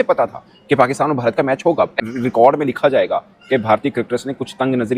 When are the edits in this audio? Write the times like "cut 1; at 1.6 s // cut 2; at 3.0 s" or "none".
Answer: cut 1; at 2.0 s